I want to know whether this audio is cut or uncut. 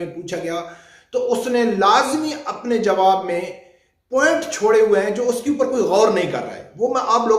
uncut